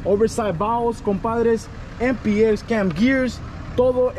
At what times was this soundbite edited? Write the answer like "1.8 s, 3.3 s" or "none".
none